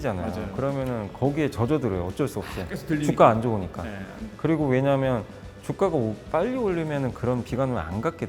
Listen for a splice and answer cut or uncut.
uncut